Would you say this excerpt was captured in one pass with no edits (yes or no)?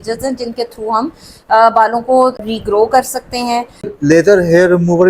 no